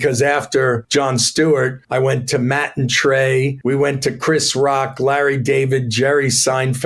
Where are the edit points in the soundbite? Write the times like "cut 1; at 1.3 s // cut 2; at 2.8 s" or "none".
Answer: cut 1; at 0.8 s // cut 2; at 1.8 s // cut 3; at 3.5 s

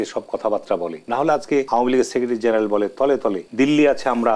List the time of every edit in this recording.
cut 1; at 1.0 s // cut 2; at 1.7 s // cut 3; at 3.4 s

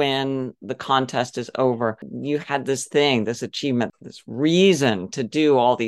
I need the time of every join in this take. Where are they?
cut 1; at 2.1 s // cut 2; at 3.9 s

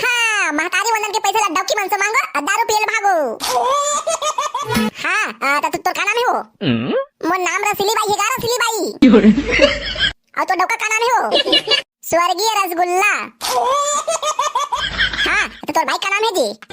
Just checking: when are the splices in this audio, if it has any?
cut 1; at 4.7 s // cut 2; at 14.9 s

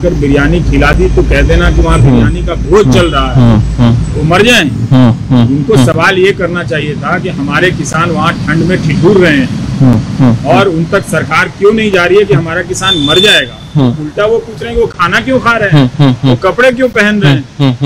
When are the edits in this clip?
none

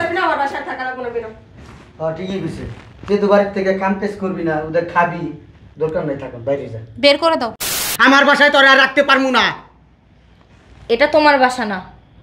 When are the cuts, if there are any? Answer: cut 1; at 7.8 s

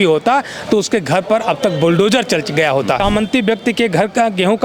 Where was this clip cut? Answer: cut 1; at 3.0 s

